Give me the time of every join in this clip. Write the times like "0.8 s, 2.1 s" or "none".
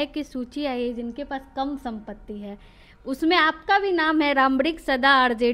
none